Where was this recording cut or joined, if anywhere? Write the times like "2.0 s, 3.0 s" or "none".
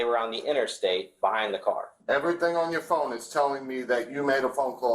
1.9 s